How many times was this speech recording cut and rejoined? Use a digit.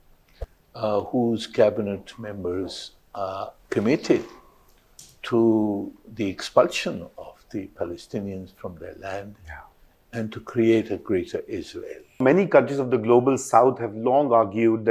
2